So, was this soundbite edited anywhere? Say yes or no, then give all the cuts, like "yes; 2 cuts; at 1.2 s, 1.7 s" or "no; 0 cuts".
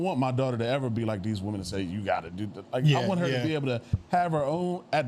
no; 0 cuts